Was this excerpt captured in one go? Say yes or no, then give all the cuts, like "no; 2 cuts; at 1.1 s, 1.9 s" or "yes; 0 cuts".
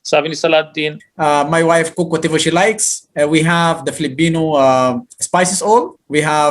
no; 1 cut; at 1.0 s